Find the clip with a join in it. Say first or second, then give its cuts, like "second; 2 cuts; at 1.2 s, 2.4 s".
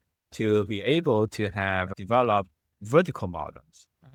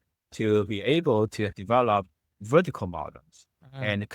second; 1 cut; at 1.6 s